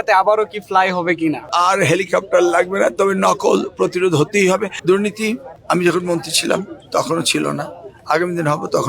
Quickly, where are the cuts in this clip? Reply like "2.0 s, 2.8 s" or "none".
1.5 s, 4.7 s